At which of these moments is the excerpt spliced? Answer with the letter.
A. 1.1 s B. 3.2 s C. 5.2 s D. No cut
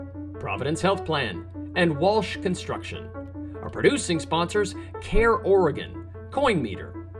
B